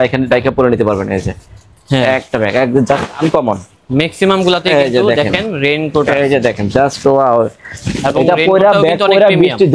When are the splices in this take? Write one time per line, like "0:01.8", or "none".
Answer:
none